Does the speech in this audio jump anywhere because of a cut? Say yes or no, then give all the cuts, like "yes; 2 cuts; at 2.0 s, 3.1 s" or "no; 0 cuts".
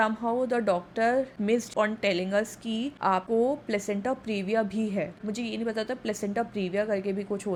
no; 0 cuts